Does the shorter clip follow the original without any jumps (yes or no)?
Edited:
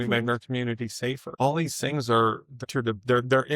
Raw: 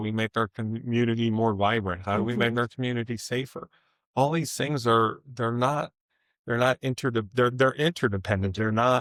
no